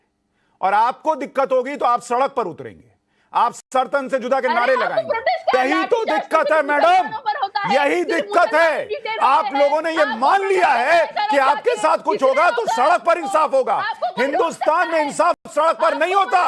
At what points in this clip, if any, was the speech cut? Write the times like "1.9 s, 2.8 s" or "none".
5.5 s